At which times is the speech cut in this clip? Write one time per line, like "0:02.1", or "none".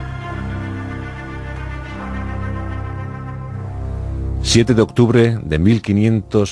none